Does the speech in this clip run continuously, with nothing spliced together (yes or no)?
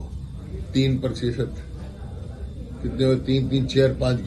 yes